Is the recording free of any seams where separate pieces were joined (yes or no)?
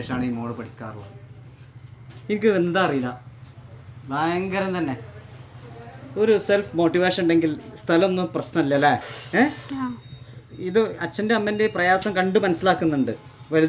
yes